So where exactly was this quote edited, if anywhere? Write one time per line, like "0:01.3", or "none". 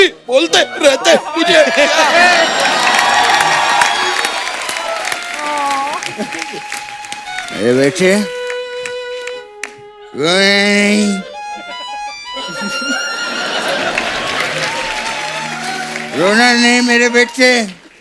none